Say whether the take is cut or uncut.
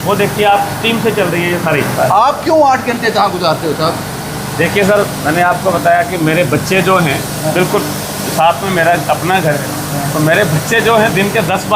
cut